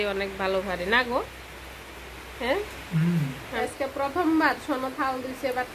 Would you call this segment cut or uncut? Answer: cut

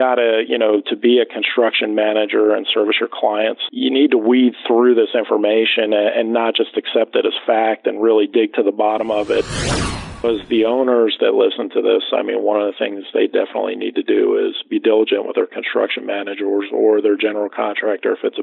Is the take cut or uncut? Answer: cut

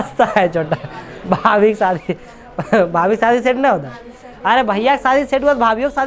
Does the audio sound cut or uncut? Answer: uncut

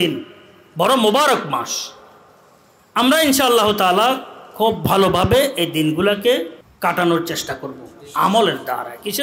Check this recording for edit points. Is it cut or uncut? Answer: cut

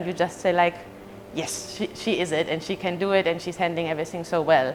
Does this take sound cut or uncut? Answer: uncut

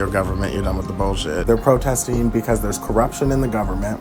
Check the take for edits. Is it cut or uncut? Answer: uncut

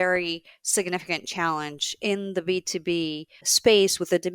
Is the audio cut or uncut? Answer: cut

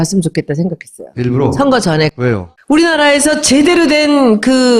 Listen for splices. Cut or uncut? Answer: cut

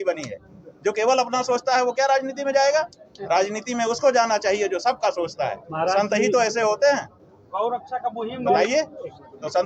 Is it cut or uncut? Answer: uncut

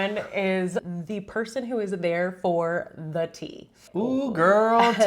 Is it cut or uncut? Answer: cut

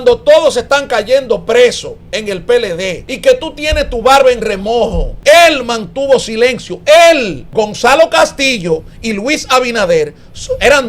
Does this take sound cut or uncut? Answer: cut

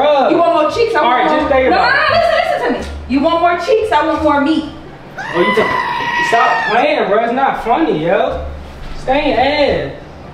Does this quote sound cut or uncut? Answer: uncut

